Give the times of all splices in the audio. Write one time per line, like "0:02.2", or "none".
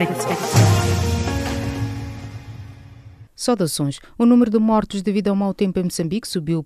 0:03.5